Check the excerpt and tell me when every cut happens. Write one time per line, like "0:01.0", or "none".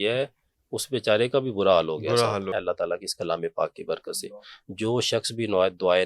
0:02.6